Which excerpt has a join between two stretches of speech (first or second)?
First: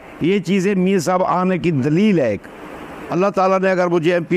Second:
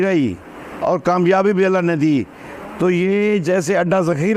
first